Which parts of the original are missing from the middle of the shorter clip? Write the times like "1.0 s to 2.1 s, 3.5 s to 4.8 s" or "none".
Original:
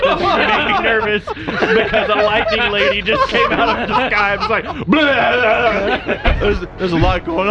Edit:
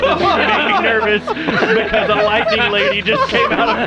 none